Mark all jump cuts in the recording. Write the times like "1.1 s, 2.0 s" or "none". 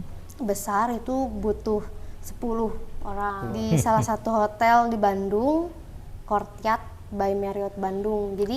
3.4 s